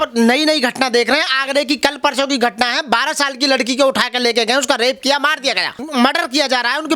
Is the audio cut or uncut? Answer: cut